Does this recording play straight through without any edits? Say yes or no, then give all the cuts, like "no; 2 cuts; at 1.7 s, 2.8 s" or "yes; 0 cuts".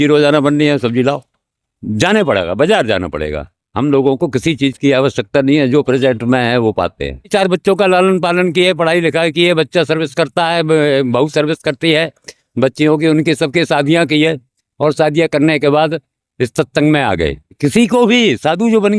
no; 2 cuts; at 7.3 s, 17.5 s